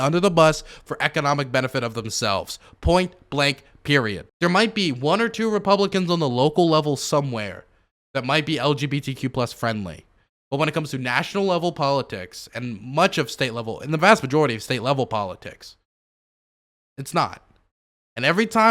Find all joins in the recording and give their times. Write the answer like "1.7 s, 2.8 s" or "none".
4.3 s